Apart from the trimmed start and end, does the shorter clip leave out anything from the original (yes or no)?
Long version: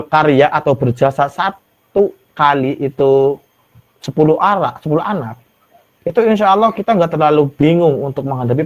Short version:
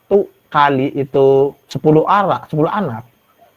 yes